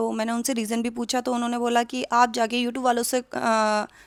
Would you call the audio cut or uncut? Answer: uncut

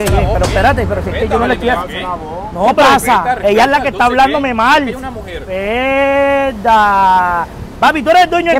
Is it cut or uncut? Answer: uncut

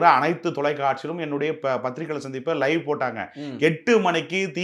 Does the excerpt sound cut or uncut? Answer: uncut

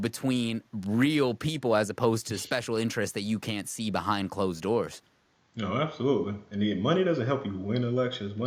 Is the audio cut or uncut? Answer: uncut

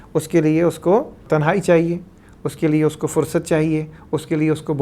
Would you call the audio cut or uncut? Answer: cut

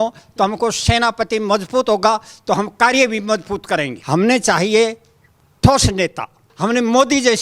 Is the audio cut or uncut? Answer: cut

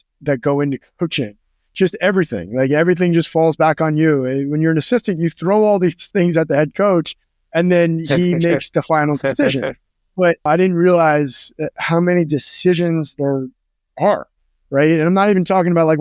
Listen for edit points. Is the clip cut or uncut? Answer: cut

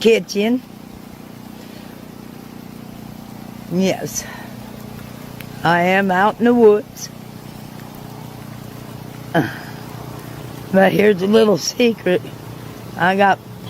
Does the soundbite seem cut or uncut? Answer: uncut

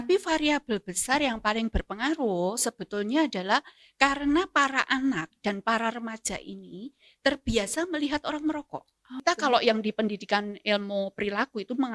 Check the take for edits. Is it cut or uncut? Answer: cut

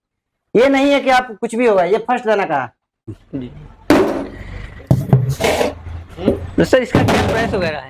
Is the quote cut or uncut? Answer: cut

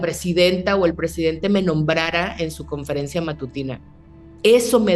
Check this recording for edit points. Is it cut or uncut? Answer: uncut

